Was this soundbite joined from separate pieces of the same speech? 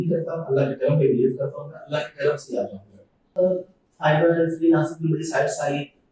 yes; 1 cut; at 3.4 s

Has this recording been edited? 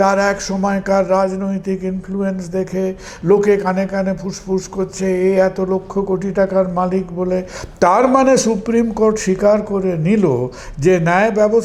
no; 0 cuts

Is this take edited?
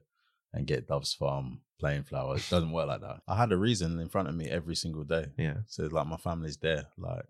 yes; 1 cut; at 3.1 s

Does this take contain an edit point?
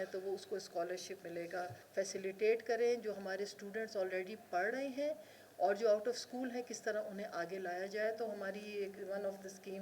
yes; 1 cut; at 1.8 s

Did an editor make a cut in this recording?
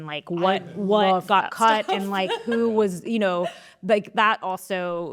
no; 0 cuts

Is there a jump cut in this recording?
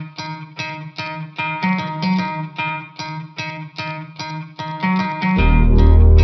no; 0 cuts

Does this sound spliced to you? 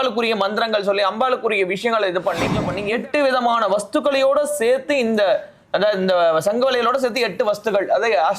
yes; 1 cut; at 2.7 s

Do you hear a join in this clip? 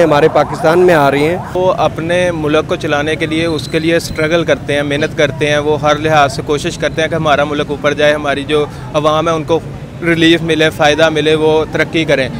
yes; 1 cut; at 1.6 s

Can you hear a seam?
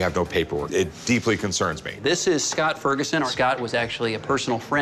yes; 2 cuts; at 1.9 s, 3.3 s

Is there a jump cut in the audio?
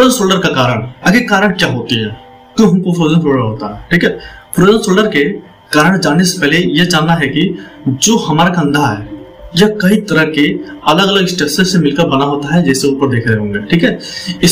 no; 0 cuts

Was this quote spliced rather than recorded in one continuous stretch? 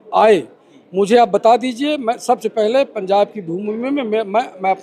no; 0 cuts

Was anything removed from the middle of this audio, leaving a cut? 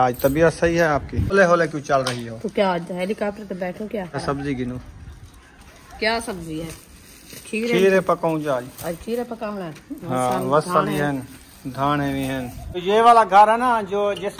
yes; 3 cuts; at 1.3 s, 4.2 s, 12.8 s

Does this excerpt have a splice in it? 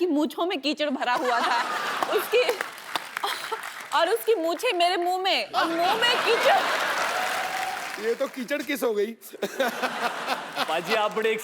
yes; 1 cut; at 7.9 s

